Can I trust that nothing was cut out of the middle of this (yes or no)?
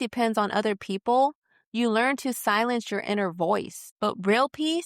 no